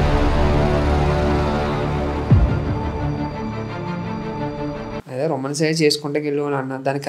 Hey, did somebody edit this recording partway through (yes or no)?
yes